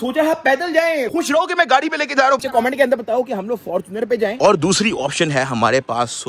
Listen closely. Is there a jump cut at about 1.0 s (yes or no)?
yes